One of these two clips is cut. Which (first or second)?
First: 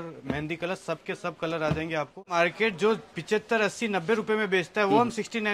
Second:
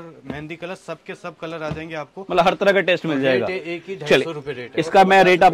first